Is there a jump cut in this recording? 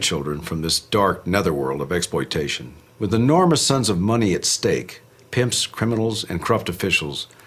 yes; 1 cut; at 5.6 s

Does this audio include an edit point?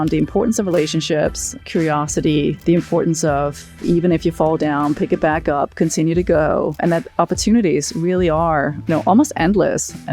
yes; 5 cuts; at 1.6 s, 2.6 s, 3.8 s, 6.8 s, 8.8 s

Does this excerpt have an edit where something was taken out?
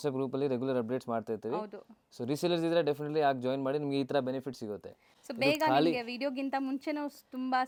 no; 0 cuts

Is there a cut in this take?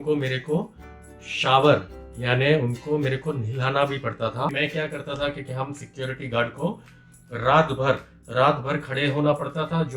yes; 1 cut; at 4.5 s

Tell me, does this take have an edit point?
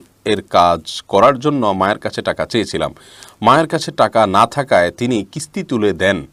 no; 0 cuts

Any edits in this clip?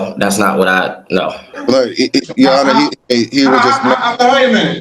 yes; 2 cuts; at 1.4 s, 3.0 s

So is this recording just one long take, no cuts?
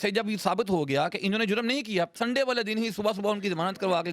no; 1 cut; at 2.2 s

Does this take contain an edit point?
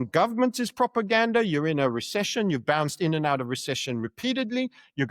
no; 0 cuts

